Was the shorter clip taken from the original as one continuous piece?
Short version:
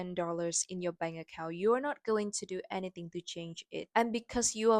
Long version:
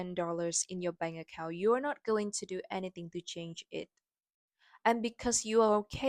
no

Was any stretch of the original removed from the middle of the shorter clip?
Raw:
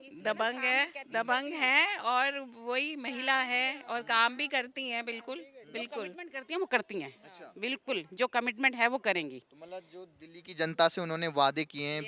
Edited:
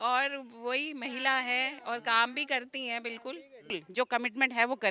yes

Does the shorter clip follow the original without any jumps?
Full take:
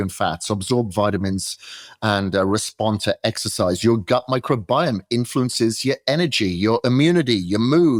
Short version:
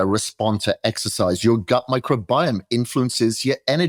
yes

